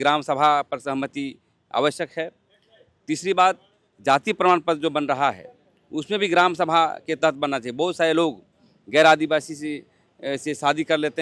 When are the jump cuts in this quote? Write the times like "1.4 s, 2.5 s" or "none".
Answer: none